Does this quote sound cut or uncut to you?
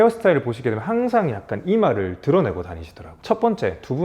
cut